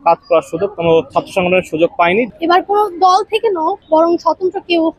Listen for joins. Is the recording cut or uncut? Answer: cut